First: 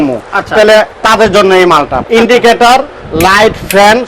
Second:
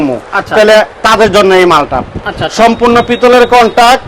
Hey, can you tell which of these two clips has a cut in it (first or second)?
first